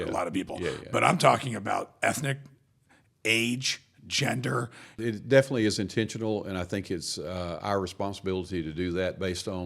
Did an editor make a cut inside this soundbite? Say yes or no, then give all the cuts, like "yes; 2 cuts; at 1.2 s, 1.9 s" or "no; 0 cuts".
yes; 1 cut; at 5.0 s